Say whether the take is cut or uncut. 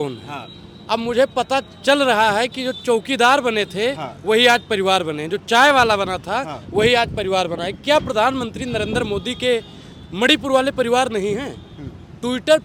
uncut